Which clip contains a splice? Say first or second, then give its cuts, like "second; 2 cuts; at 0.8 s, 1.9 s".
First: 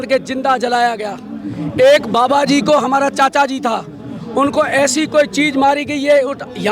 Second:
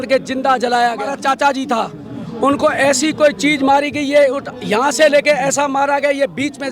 second; 1 cut; at 1.2 s